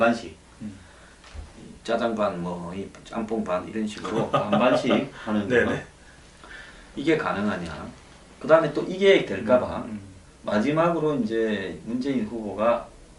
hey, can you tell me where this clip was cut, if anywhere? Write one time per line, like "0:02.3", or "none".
0:03.5